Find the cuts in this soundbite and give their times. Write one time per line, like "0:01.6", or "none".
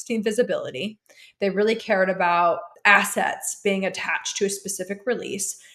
0:02.7